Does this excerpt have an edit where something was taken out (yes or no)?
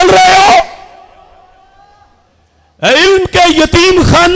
no